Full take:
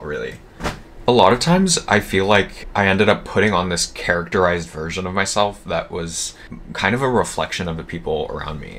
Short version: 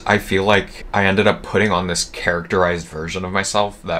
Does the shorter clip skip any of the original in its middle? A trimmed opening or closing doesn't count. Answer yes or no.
no